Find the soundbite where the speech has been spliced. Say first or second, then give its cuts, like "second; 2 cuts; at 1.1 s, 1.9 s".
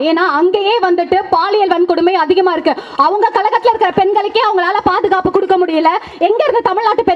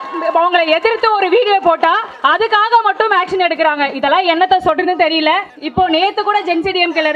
second; 2 cuts; at 2.1 s, 5.6 s